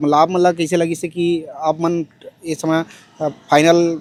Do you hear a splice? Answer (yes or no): no